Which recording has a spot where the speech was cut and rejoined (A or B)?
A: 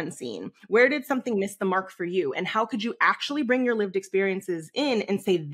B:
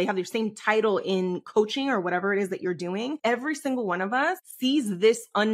B